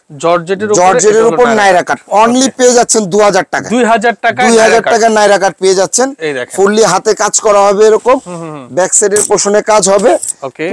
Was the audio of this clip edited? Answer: no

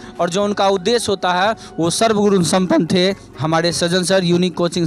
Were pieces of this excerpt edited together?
no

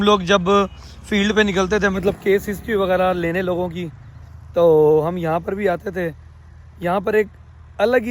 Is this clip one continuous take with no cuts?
yes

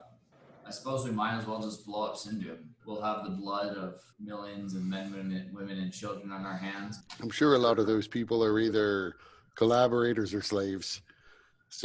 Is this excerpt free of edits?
no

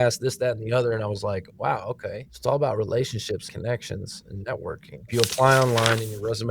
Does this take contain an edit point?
yes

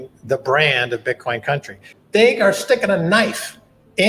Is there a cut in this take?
yes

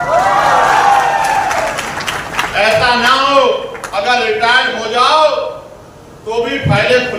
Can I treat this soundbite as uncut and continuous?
yes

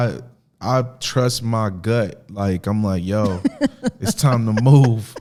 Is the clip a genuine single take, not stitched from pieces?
yes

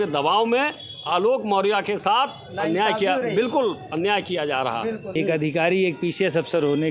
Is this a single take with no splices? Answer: no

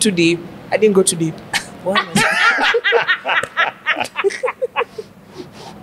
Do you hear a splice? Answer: no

